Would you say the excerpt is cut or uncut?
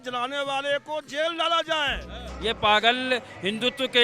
cut